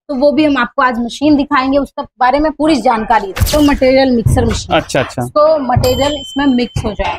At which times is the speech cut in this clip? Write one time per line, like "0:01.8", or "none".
0:03.5